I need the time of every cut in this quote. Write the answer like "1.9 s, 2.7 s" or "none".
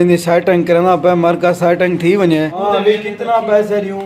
2.6 s